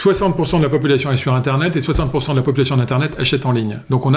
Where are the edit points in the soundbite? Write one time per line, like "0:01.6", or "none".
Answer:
none